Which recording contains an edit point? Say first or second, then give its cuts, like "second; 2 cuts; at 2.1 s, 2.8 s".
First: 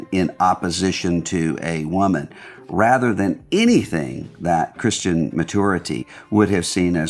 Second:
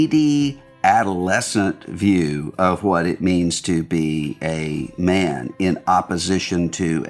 first; 1 cut; at 6.0 s